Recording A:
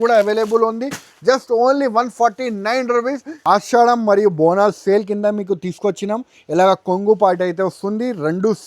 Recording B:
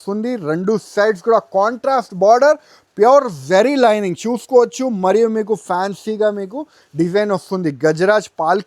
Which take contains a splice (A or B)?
A